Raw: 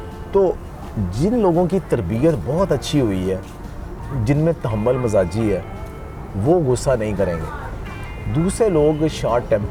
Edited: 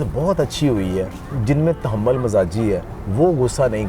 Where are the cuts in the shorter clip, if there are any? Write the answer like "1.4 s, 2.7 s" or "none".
1.2 s, 3.0 s